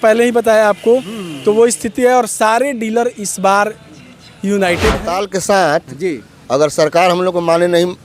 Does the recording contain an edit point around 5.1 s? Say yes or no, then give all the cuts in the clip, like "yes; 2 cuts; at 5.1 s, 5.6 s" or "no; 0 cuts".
yes; 1 cut; at 5.1 s